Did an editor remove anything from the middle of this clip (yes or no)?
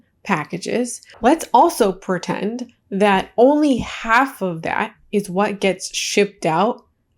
yes